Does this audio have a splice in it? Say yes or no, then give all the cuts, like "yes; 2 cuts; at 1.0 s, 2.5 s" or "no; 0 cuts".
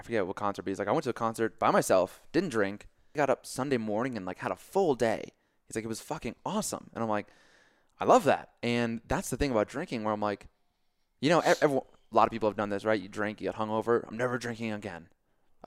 yes; 1 cut; at 3.1 s